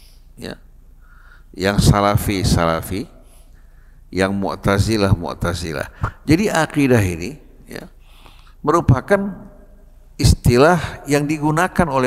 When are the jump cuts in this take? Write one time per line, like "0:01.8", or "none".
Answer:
none